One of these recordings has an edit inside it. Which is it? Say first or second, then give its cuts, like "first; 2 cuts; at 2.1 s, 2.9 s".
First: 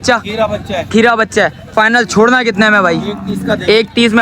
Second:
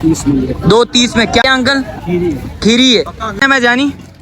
second; 2 cuts; at 1.4 s, 3.4 s